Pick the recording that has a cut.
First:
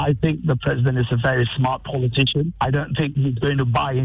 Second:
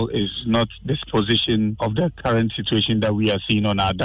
second; 1 cut; at 1.8 s

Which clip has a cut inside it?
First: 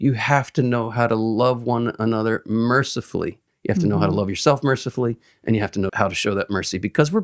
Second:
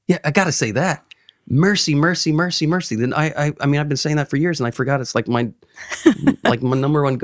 first; 2 cuts; at 3.5 s, 5.9 s

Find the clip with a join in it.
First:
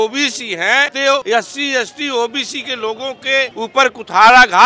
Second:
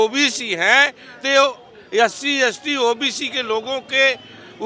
first; 2 cuts; at 1.1 s, 3.5 s

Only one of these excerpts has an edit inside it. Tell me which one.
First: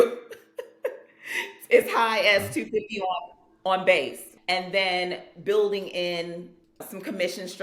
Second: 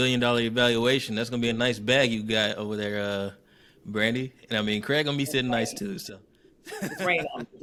first; 2 cuts; at 4.3 s, 6.8 s

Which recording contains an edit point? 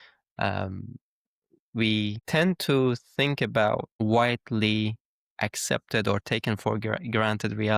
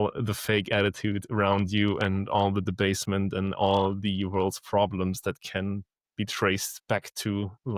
first; 2 cuts; at 2.2 s, 3.9 s

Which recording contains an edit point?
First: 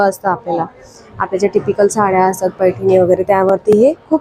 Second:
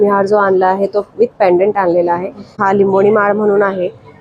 second; 1 cut; at 2.5 s

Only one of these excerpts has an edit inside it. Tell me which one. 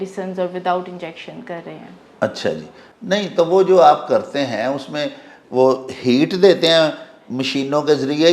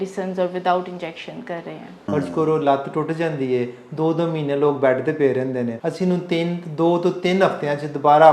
second; 2 cuts; at 1.9 s, 5.8 s

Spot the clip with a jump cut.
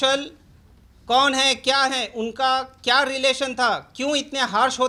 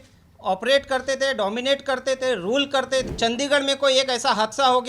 second; 1 cut; at 3.1 s

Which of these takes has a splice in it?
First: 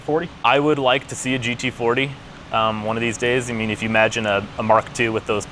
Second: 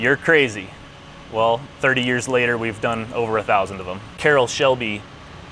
second; 1 cut; at 4.2 s

